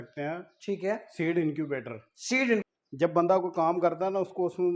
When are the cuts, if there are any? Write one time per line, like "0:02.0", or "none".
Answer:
0:02.6